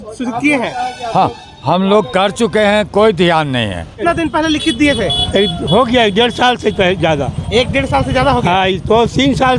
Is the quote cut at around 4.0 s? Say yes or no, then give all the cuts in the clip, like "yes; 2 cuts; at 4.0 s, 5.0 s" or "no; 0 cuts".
yes; 1 cut; at 4.0 s